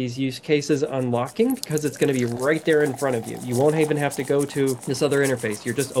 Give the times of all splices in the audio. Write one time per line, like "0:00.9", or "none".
0:04.9